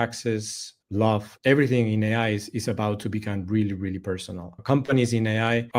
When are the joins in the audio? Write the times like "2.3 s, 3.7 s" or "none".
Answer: 1.3 s